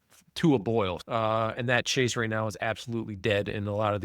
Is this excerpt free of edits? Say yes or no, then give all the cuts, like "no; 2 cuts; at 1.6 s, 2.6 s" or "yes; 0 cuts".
no; 1 cut; at 1.0 s